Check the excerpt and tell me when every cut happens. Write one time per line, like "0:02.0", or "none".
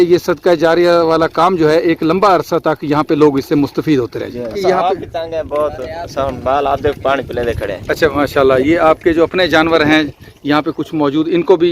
0:04.5